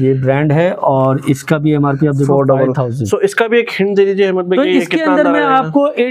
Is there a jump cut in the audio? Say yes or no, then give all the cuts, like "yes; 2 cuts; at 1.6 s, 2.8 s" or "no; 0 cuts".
no; 0 cuts